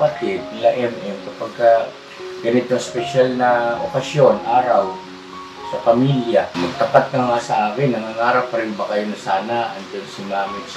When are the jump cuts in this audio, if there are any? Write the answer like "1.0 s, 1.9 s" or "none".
6.5 s